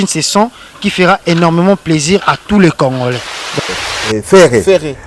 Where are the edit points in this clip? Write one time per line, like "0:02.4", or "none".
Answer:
0:03.6